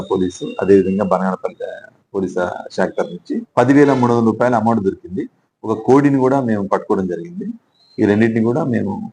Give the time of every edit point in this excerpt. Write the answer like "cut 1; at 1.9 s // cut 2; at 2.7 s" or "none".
cut 1; at 3.4 s